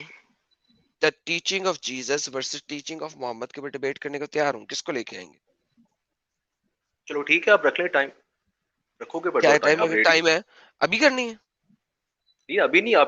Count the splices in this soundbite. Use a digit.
0